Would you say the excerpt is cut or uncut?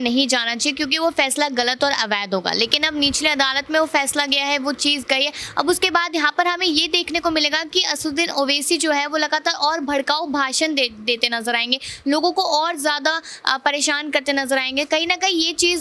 uncut